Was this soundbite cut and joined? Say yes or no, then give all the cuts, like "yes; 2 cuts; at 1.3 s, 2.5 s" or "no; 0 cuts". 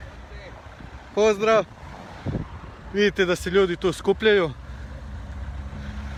no; 0 cuts